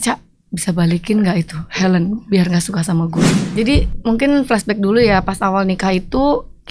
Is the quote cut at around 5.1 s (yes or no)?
no